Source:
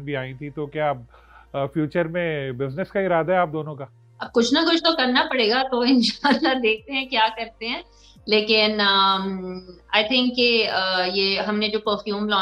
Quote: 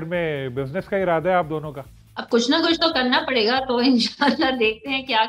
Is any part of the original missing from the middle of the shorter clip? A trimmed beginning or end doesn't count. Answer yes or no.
no